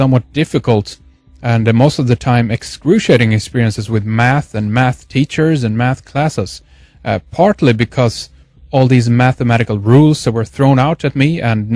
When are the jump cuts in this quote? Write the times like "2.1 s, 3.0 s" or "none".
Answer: 6.6 s